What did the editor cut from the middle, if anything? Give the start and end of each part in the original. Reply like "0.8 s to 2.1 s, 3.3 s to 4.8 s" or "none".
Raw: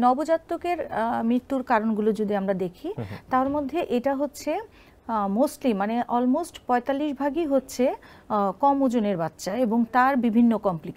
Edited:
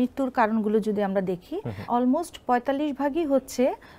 3.2 s to 6.1 s